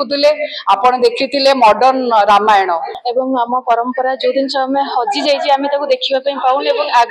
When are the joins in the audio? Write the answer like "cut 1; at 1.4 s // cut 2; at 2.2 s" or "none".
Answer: cut 1; at 3.0 s